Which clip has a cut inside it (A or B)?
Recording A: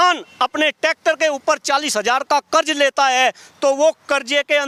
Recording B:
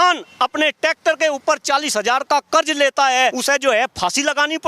B